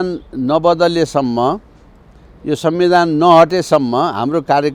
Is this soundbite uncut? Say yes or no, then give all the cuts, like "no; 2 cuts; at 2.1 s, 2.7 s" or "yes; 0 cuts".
yes; 0 cuts